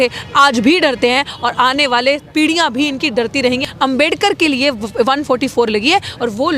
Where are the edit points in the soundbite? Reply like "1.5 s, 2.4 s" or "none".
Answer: 3.6 s